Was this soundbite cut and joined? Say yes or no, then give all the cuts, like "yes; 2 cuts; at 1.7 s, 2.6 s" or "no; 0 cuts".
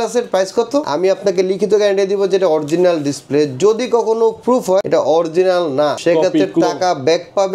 yes; 3 cuts; at 0.9 s, 4.9 s, 6.0 s